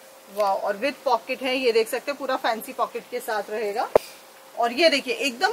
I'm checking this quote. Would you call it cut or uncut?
cut